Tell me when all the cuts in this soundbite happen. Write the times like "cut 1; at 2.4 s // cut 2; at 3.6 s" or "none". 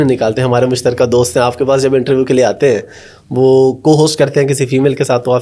none